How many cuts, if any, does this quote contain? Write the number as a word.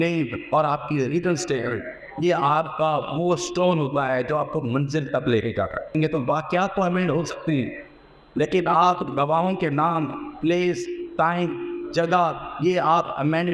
one